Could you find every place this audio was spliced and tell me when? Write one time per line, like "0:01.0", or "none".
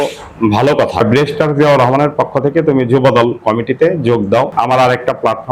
0:01.0
0:04.5